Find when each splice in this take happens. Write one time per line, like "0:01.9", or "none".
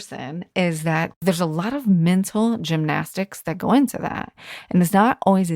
0:01.1